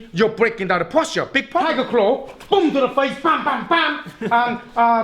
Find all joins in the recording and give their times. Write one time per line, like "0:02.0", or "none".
0:01.7